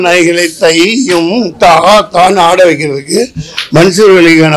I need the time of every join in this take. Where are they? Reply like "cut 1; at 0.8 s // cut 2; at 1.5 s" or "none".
none

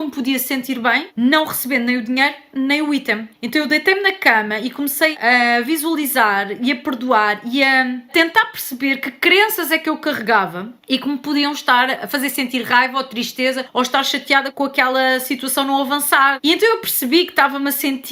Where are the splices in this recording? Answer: none

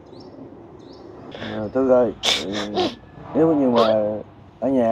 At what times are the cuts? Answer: cut 1; at 1.2 s

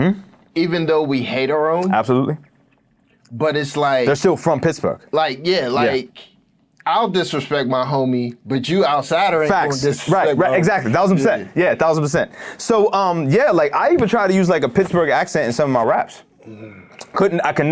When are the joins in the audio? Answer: none

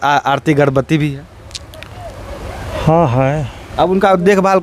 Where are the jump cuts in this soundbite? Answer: cut 1; at 3.6 s

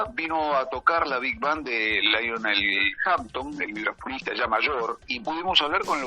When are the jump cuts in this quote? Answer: cut 1; at 5.0 s

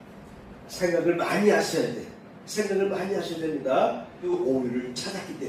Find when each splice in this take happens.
cut 1; at 4.1 s

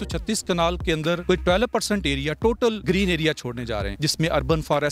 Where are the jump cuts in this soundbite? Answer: cut 1; at 1.0 s // cut 2; at 2.8 s // cut 3; at 3.9 s

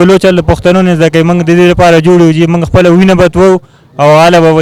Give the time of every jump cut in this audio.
none

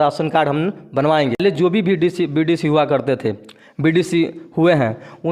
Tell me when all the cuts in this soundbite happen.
cut 1; at 1.4 s

